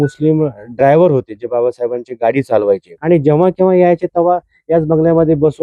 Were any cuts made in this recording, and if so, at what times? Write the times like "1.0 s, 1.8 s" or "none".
2.9 s